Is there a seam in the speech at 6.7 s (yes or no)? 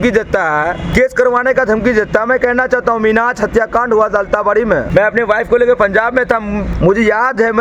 yes